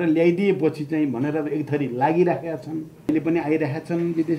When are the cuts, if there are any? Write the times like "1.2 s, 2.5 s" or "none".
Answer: 3.1 s